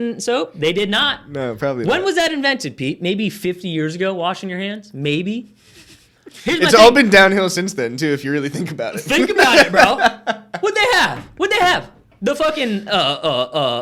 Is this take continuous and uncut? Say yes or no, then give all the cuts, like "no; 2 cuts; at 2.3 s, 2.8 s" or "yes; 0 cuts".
yes; 0 cuts